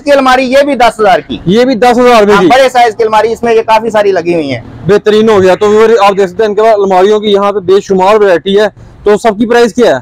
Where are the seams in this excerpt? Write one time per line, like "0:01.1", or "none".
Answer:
none